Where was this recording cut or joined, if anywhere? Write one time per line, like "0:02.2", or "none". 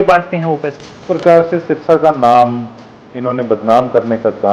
0:01.1